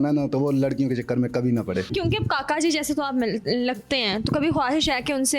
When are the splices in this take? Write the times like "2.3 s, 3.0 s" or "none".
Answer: 1.9 s